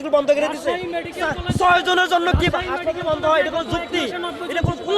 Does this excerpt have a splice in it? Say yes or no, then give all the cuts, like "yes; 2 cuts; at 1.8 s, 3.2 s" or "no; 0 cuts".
no; 0 cuts